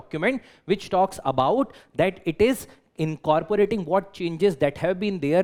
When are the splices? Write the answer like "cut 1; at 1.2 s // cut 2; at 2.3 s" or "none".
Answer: none